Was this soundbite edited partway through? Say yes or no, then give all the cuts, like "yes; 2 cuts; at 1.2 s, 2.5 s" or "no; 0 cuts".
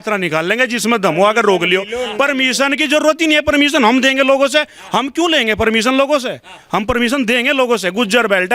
no; 0 cuts